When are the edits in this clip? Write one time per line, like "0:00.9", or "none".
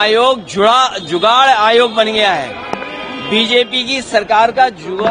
none